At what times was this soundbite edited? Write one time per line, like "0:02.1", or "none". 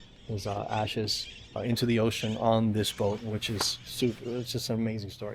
0:01.6